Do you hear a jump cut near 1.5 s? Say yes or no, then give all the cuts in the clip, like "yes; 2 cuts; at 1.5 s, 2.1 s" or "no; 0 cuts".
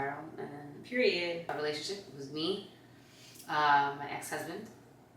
yes; 1 cut; at 1.5 s